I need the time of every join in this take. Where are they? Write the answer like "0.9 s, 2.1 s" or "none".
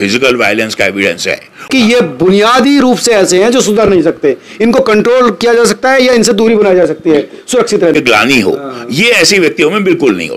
1.7 s, 7.9 s